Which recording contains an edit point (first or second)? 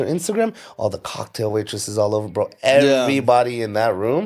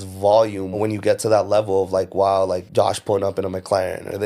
second